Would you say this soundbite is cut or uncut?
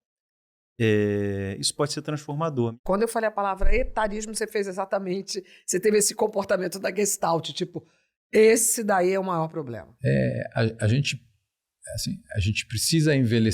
cut